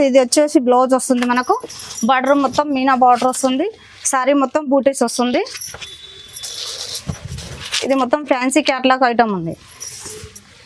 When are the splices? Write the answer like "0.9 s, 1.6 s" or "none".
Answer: none